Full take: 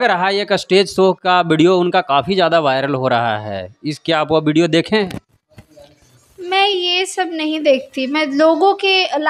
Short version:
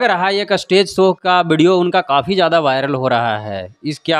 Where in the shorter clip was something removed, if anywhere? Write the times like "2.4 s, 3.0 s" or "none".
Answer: none

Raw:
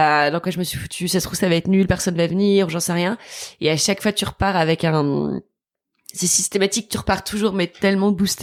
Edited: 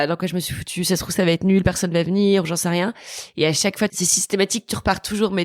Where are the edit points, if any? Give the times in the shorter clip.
3.9 s

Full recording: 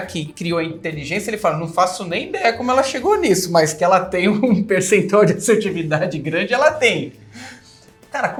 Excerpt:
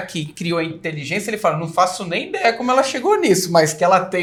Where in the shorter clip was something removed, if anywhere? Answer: none

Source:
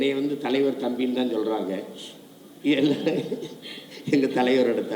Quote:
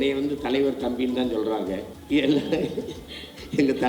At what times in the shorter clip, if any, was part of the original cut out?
1.9 s

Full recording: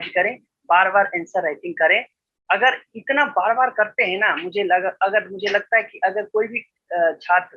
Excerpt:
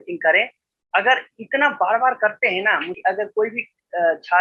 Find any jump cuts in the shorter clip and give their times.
2.9 s

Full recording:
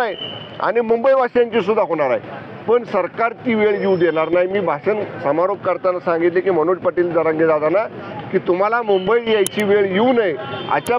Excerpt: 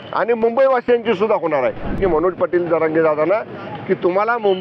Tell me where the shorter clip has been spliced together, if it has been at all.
2.0 s

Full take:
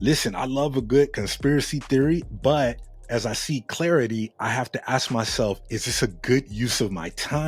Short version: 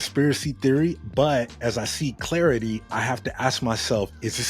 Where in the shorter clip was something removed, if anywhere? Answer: 1.5 s

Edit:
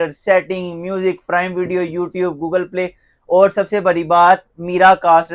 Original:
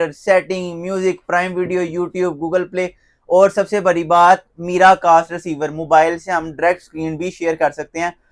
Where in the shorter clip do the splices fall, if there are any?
none

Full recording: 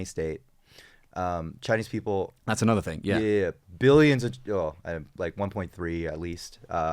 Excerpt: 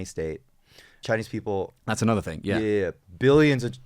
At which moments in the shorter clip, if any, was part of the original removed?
0.9 s

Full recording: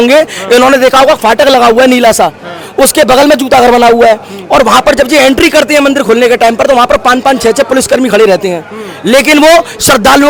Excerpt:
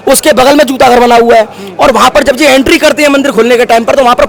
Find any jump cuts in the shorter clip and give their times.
none

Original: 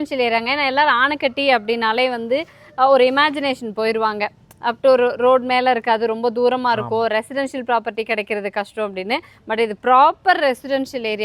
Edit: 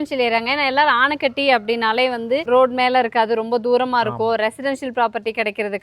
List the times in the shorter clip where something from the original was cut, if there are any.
2.4 s

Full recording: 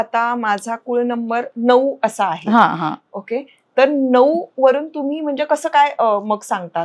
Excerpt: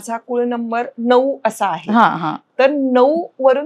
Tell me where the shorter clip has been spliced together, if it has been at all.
2.4 s

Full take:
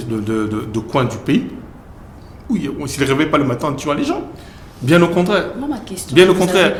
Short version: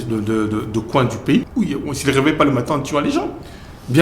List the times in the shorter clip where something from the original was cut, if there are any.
1.5 s

